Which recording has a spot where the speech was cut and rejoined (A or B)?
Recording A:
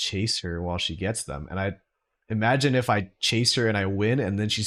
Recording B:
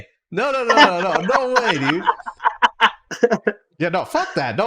B